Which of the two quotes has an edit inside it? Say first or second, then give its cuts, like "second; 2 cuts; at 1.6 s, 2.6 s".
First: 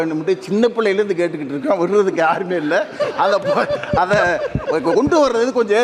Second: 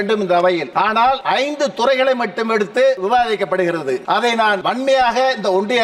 second; 3 cuts; at 1.1 s, 3.0 s, 4.5 s